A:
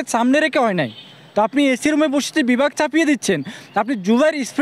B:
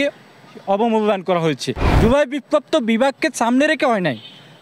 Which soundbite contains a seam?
B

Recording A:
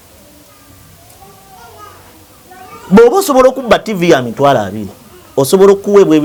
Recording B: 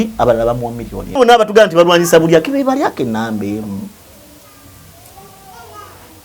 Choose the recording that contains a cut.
B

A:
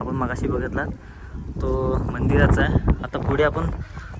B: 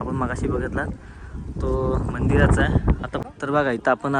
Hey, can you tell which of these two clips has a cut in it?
B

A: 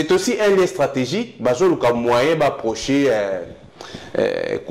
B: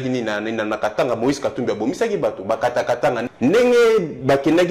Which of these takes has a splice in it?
B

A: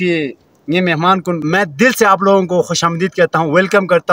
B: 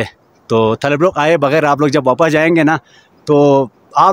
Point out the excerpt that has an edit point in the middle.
A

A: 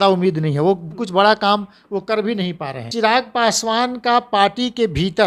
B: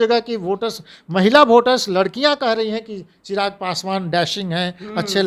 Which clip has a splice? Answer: A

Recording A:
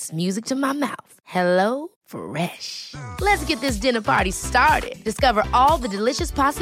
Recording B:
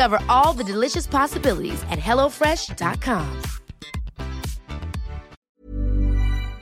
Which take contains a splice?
B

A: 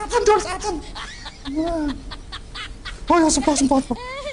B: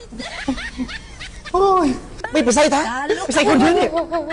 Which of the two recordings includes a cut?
B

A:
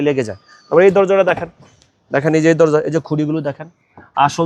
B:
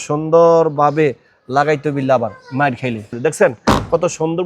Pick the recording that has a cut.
B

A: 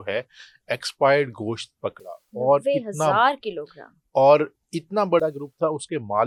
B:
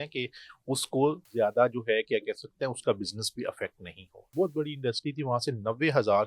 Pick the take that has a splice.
B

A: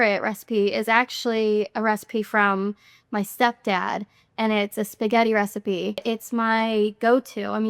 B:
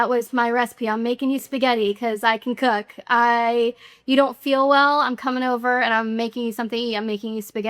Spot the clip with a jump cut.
A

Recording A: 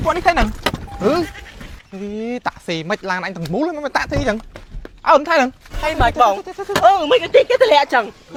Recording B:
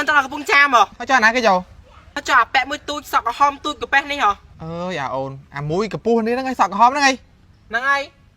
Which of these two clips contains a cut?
B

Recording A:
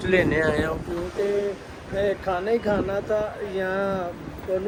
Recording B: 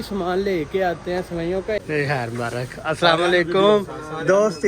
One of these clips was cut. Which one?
B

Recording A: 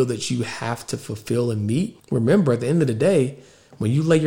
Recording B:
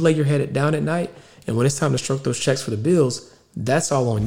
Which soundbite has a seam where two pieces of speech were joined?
A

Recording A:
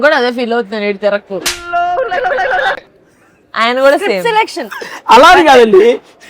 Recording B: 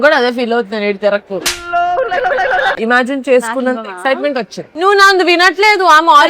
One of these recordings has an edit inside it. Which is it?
B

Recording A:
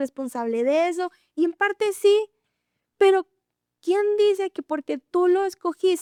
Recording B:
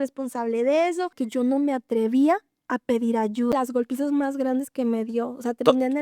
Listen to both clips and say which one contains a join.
B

